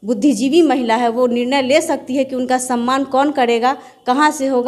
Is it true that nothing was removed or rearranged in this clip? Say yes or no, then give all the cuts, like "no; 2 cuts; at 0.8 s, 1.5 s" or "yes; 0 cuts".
yes; 0 cuts